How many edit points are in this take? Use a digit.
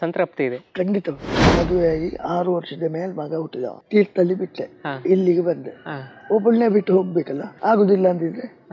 3